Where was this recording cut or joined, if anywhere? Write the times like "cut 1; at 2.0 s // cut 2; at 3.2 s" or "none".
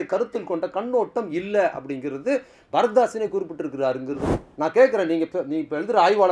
cut 1; at 4.2 s